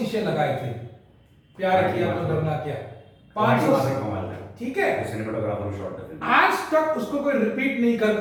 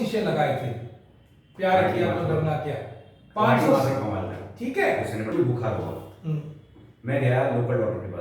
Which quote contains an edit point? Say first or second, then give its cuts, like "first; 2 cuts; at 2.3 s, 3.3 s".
second; 1 cut; at 5.3 s